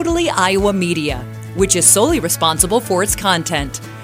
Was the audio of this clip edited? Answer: no; 0 cuts

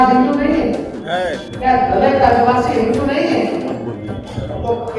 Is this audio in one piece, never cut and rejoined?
yes; 0 cuts

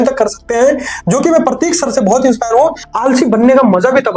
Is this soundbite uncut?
no; 1 cut; at 2.9 s

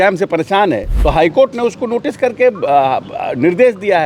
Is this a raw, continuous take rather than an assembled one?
no; 1 cut; at 0.9 s

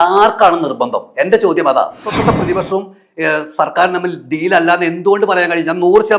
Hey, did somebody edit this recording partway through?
yes; 1 cut; at 2.1 s

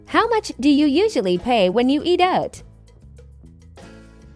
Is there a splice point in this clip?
no; 0 cuts

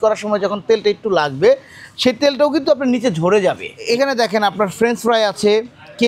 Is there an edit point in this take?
yes; 1 cut; at 3.7 s

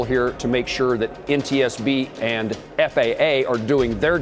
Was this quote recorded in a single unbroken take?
no; 1 cut; at 2.6 s

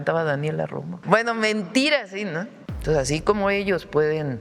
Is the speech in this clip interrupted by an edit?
yes; 2 cuts; at 0.9 s, 2.6 s

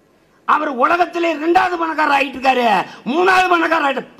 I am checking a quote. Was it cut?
no; 0 cuts

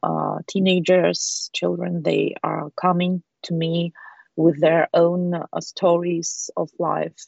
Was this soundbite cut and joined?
no; 0 cuts

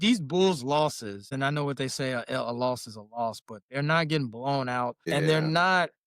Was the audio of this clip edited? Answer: yes; 2 cuts; at 1.3 s, 5.0 s

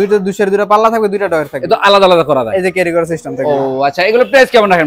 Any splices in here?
no; 0 cuts

